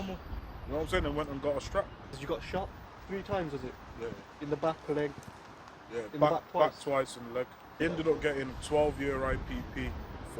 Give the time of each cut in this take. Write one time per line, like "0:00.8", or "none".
0:02.2
0:07.8